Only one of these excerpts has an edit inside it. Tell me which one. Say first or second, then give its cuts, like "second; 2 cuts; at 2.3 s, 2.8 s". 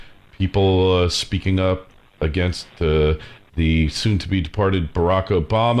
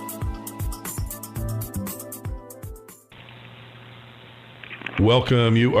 second; 1 cut; at 3.0 s